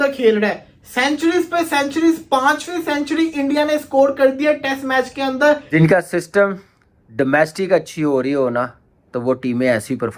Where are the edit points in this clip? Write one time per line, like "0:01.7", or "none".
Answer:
0:05.7